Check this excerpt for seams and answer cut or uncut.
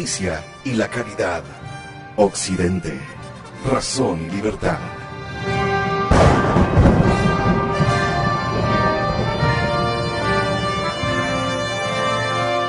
cut